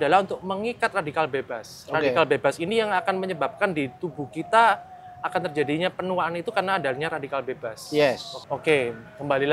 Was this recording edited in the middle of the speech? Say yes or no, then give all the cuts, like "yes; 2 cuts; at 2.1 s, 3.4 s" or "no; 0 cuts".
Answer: yes; 1 cut; at 8.3 s